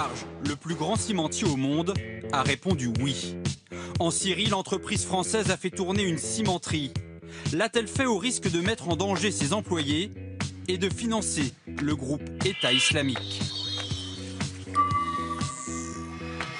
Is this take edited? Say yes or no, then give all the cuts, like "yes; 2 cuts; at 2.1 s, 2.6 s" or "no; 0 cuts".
yes; 1 cut; at 11.4 s